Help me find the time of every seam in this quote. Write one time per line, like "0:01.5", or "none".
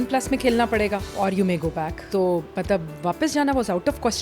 0:01.1
0:02.0